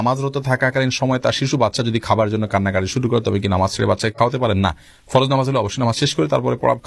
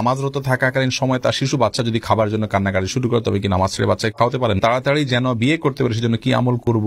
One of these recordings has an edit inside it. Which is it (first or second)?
second